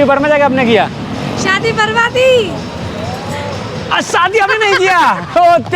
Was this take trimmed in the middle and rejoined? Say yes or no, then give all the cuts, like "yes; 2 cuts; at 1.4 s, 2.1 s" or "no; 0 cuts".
no; 0 cuts